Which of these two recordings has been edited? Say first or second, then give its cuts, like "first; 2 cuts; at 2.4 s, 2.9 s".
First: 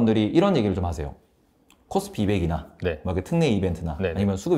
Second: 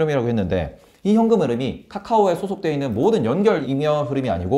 second; 1 cut; at 3.6 s